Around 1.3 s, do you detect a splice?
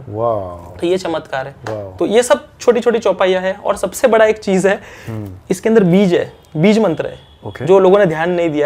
no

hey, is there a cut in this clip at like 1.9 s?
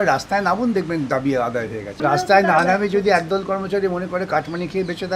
yes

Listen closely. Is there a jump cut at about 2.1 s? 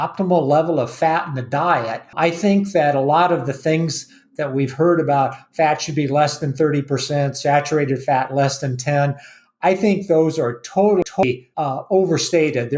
yes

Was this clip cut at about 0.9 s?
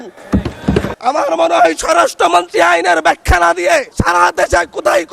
yes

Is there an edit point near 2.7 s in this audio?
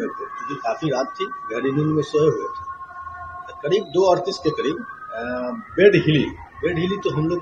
no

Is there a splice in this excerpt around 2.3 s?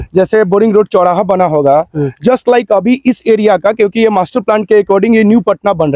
no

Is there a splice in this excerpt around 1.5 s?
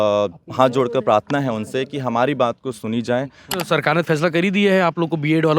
no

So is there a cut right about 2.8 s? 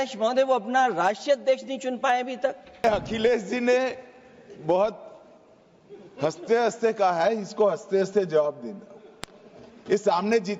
yes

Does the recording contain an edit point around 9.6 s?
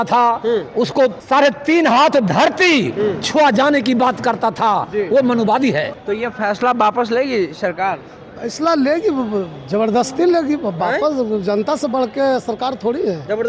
no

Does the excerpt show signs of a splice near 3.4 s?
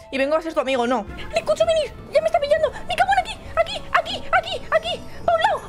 no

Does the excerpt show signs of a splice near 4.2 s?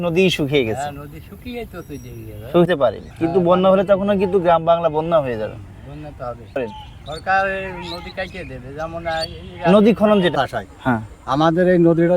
no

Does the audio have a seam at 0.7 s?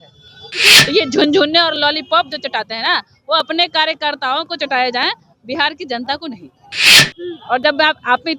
yes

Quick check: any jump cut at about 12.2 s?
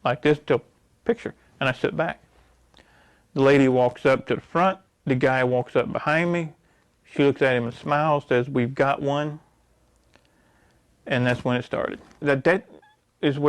yes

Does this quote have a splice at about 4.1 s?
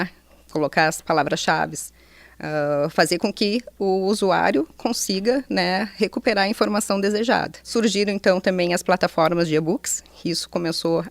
no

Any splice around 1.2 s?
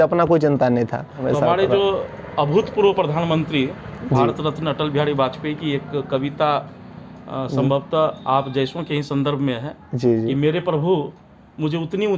yes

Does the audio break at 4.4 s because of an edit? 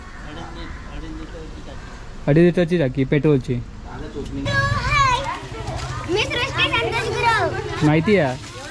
yes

